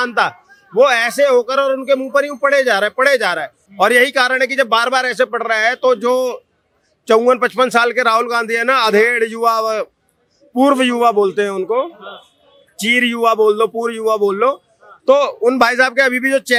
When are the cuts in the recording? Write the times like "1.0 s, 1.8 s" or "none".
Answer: none